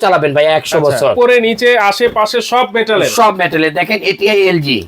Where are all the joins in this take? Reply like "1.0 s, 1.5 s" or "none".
1.1 s